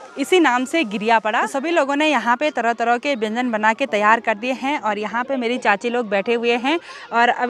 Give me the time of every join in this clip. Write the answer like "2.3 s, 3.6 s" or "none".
none